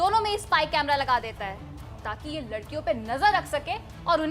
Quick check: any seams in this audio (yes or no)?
no